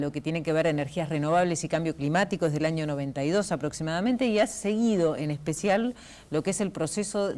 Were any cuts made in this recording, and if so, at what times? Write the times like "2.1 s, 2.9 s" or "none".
6.2 s